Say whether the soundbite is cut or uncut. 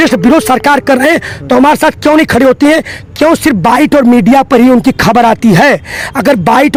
uncut